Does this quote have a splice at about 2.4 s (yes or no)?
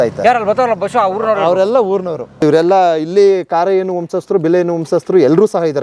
yes